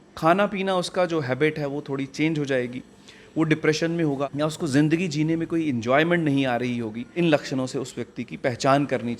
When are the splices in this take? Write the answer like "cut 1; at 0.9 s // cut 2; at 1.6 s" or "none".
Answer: cut 1; at 4.3 s // cut 2; at 7.1 s